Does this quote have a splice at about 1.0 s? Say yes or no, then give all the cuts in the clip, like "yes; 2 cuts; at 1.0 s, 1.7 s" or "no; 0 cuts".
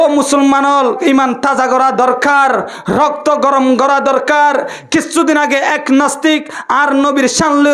yes; 1 cut; at 1.0 s